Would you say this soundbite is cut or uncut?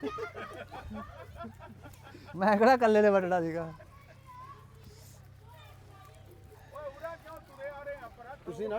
uncut